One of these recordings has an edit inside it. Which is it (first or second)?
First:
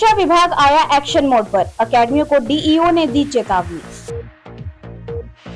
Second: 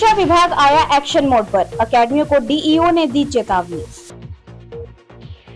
second